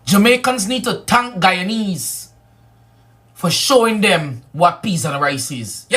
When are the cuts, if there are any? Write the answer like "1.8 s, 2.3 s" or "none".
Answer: 2.5 s